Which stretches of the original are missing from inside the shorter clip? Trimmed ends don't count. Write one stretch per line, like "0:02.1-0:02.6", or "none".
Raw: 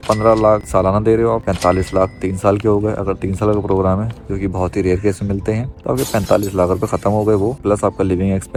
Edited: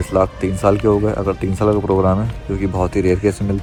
none